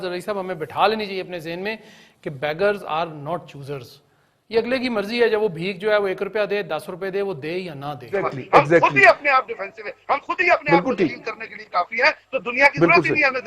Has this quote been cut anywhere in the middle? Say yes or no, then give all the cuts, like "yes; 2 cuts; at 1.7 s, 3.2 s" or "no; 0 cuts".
yes; 1 cut; at 8.2 s